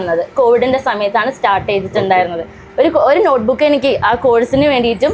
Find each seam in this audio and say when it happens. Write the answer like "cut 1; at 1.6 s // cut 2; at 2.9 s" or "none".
cut 1; at 2.6 s